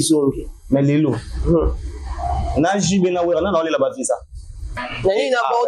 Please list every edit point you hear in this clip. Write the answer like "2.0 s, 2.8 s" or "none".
4.7 s